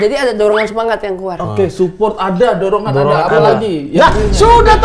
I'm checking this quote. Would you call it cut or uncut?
uncut